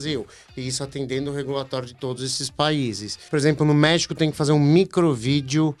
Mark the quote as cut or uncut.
cut